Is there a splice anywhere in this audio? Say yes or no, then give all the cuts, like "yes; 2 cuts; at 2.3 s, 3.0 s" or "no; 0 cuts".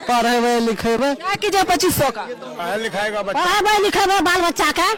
no; 0 cuts